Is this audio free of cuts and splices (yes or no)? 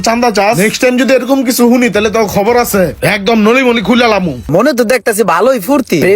no